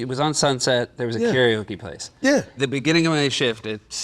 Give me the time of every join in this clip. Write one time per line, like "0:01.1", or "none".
0:02.5